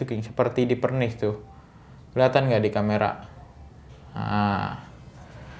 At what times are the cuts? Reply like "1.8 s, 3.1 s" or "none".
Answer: none